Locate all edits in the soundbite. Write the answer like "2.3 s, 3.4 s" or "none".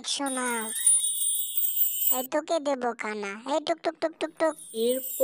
2.0 s